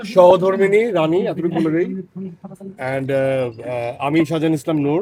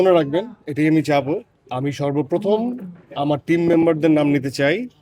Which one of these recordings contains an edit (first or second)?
second